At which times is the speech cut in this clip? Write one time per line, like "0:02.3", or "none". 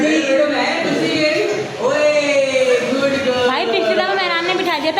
none